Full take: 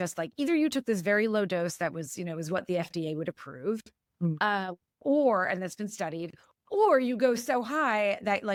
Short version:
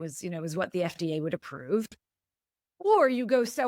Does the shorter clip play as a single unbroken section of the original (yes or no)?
no